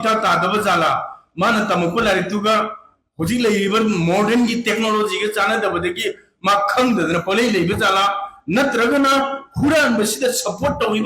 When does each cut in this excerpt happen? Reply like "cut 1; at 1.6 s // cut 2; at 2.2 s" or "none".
none